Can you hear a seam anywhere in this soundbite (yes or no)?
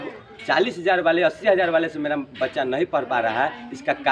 no